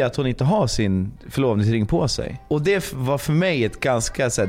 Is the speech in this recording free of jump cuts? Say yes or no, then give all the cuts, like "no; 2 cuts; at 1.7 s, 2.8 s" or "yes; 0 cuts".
no; 2 cuts; at 1.2 s, 2.4 s